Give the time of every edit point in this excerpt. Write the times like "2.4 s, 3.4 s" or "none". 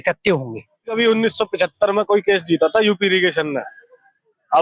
1.0 s